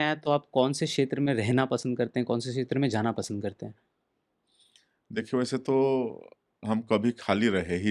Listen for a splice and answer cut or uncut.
uncut